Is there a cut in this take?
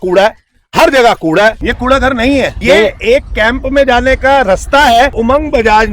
yes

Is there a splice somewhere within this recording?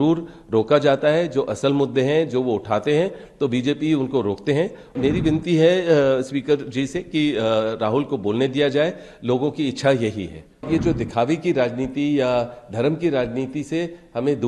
yes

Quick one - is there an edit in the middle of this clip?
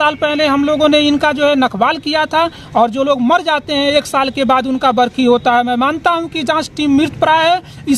no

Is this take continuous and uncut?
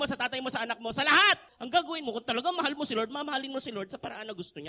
no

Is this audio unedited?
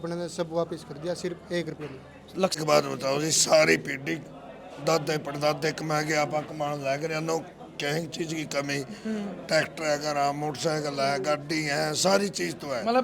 no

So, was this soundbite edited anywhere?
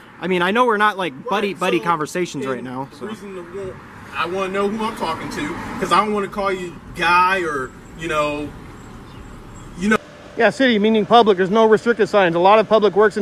yes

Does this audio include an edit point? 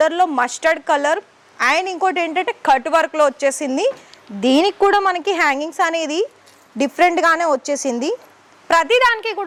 no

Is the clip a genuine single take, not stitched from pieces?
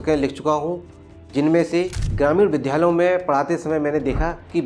no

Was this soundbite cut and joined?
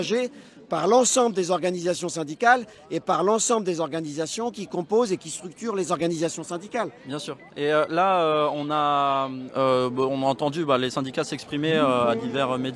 no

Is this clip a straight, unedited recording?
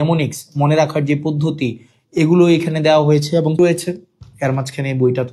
no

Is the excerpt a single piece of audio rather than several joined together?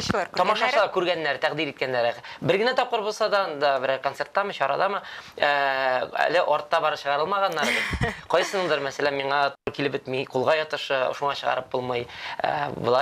yes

